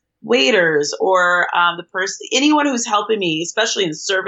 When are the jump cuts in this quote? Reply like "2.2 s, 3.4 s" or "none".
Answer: none